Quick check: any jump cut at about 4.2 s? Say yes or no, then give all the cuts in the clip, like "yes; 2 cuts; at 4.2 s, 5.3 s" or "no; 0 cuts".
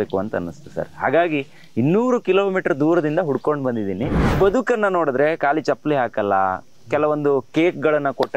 yes; 1 cut; at 4.2 s